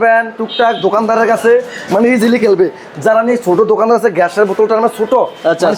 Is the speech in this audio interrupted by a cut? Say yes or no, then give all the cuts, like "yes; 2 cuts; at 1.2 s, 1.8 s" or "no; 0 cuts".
no; 0 cuts